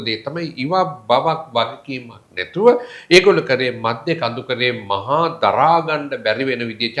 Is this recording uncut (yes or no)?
yes